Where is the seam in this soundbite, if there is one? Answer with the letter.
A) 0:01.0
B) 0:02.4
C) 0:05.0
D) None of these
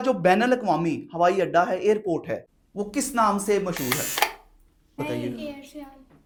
D